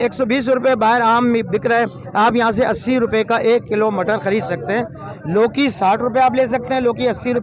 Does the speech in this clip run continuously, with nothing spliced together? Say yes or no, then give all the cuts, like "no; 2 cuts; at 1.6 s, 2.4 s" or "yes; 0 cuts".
yes; 0 cuts